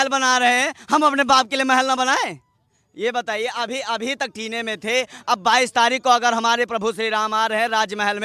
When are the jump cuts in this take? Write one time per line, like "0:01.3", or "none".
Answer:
none